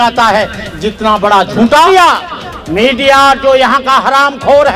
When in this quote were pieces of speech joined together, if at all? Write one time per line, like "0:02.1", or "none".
0:01.9